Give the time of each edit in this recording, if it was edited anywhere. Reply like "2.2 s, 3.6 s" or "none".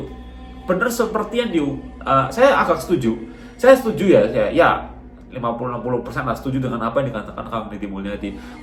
none